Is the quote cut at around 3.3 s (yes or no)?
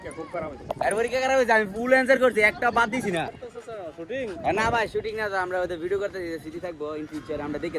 yes